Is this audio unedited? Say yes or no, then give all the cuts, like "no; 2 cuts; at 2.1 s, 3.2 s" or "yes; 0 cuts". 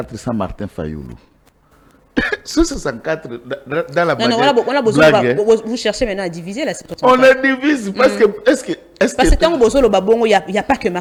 yes; 0 cuts